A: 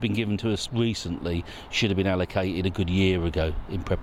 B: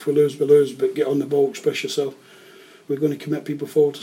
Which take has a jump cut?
B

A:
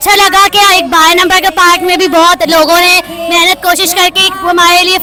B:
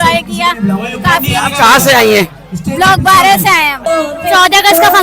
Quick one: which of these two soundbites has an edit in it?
B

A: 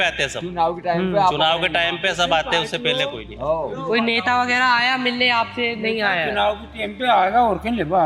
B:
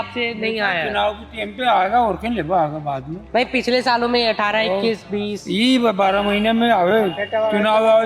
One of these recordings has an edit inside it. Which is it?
A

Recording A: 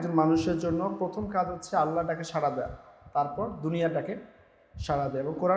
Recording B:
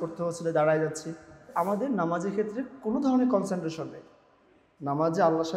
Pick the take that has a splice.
B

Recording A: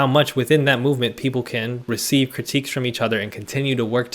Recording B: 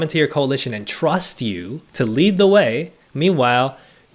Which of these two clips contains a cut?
A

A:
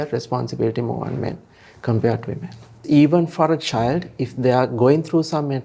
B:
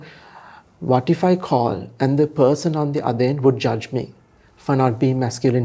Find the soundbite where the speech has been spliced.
A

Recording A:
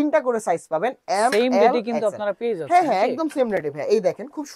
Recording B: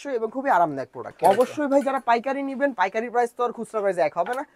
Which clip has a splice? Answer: B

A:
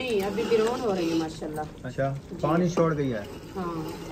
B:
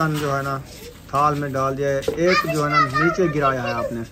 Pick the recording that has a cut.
A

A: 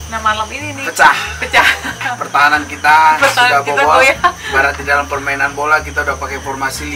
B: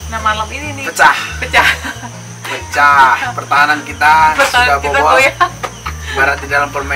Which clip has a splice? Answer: A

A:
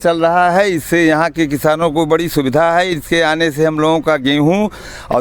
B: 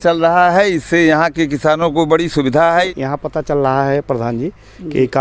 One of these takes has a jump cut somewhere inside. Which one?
B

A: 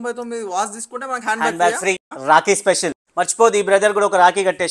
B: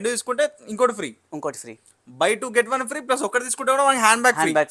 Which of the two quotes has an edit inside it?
A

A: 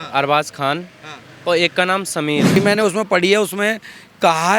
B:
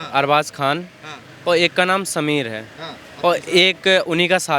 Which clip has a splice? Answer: A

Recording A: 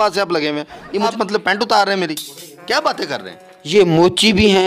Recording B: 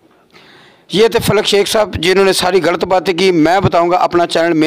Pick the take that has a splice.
A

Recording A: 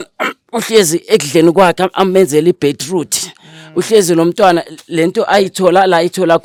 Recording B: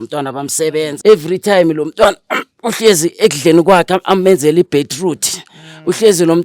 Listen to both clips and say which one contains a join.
B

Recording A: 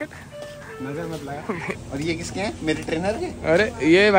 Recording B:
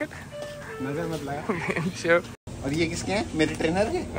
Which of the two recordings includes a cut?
A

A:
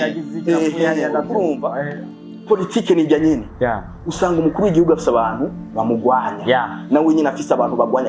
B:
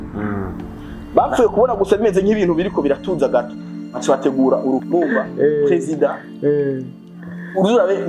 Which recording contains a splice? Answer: B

